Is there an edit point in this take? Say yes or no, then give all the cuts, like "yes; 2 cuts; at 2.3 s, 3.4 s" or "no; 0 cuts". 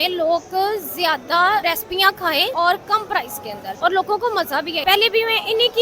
yes; 3 cuts; at 1.9 s, 3.7 s, 4.8 s